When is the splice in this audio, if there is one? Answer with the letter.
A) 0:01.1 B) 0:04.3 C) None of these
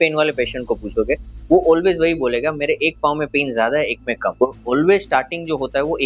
B